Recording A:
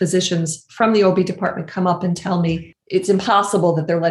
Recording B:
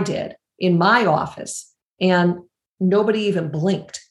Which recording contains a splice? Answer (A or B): A